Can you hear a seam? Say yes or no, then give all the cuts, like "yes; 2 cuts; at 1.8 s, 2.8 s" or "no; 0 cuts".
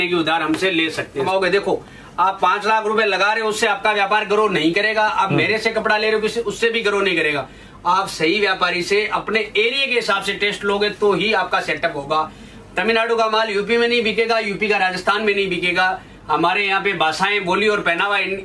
yes; 1 cut; at 1.2 s